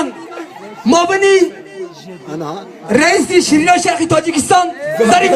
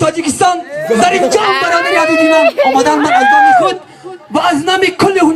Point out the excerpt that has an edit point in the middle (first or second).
first